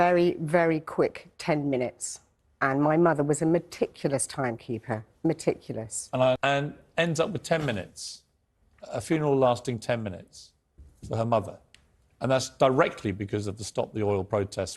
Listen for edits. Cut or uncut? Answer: cut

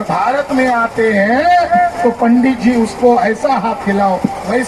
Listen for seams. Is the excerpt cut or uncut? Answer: uncut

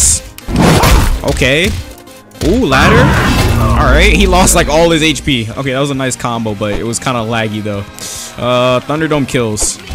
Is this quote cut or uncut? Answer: uncut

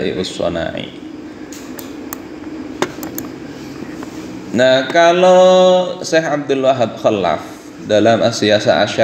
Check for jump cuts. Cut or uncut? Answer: uncut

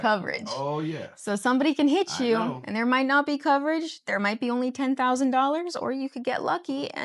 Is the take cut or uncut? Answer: uncut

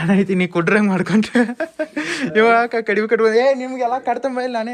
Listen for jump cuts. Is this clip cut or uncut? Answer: uncut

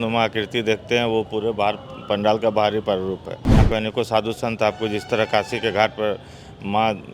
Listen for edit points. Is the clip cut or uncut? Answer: cut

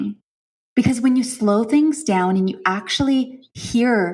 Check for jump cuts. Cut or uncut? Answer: uncut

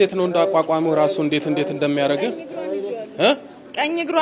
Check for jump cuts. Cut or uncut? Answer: uncut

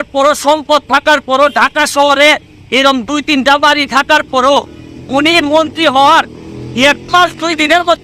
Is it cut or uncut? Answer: uncut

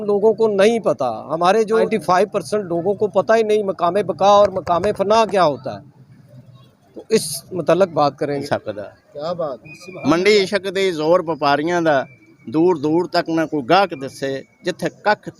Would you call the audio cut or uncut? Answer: cut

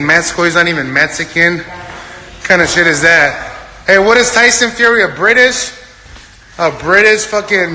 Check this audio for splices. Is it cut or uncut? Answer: uncut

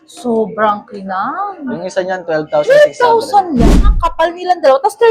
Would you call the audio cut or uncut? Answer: cut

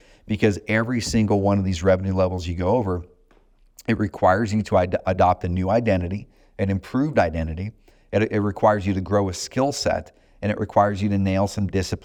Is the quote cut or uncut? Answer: uncut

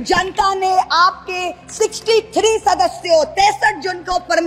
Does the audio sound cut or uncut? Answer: uncut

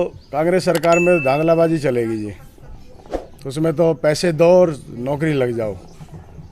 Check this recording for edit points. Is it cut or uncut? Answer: uncut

